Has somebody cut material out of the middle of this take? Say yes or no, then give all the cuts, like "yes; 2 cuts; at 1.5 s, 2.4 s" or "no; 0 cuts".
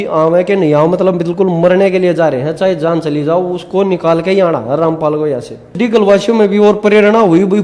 yes; 1 cut; at 5.7 s